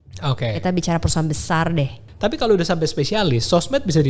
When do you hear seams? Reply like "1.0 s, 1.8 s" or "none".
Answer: 2.1 s